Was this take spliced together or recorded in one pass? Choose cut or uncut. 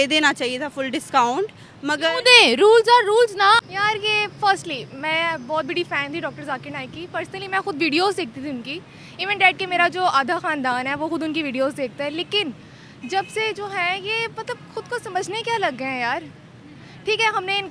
cut